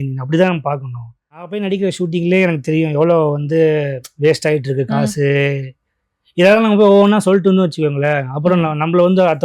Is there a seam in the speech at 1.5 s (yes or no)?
yes